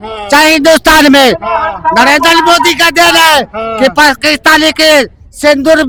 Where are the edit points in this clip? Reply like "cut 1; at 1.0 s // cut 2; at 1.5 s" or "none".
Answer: none